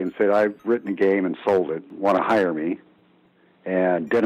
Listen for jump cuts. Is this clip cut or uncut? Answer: cut